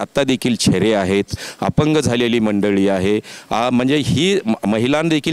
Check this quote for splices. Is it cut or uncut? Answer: uncut